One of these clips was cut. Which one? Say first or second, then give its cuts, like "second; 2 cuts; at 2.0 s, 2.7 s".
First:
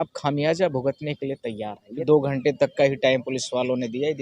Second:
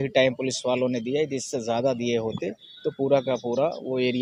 first; 1 cut; at 1.8 s